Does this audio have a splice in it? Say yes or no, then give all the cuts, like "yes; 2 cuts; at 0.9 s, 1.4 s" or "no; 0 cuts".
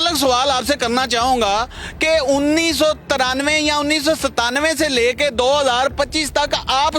no; 0 cuts